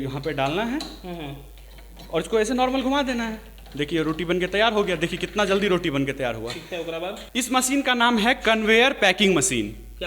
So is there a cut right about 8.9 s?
no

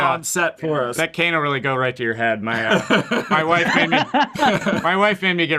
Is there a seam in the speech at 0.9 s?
yes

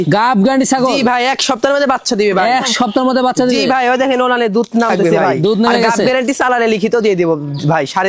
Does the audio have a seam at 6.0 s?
yes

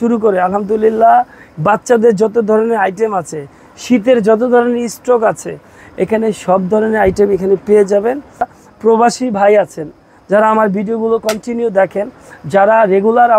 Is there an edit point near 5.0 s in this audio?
no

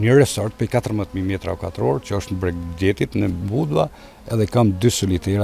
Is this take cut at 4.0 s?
no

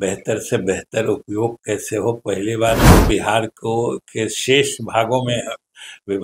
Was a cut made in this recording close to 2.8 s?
yes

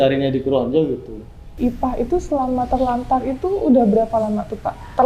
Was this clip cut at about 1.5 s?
yes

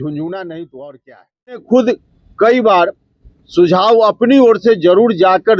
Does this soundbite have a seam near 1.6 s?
yes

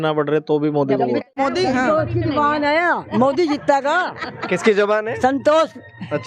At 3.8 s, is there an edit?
no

